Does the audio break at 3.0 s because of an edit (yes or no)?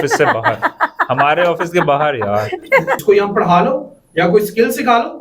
yes